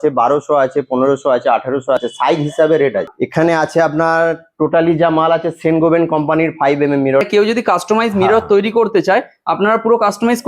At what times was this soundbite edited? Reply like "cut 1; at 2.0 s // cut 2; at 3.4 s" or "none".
cut 1; at 2.0 s // cut 2; at 3.2 s // cut 3; at 7.2 s